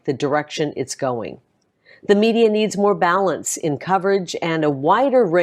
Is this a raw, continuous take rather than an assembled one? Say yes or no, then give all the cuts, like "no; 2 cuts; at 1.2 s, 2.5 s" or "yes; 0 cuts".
no; 1 cut; at 1.5 s